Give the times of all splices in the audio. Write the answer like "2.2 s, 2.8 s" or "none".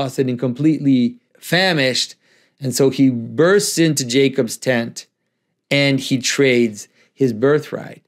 1.3 s